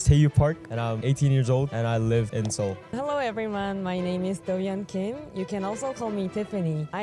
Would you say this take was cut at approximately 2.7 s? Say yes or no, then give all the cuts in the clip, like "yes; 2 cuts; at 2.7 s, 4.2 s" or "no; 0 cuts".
yes; 3 cuts; at 1.0 s, 1.7 s, 2.7 s